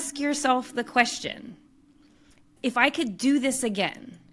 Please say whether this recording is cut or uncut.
cut